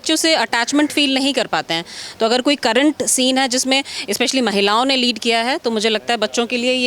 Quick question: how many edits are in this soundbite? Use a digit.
0